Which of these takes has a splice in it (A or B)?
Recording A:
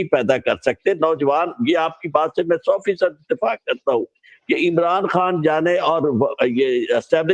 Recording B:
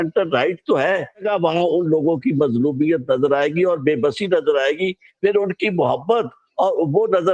B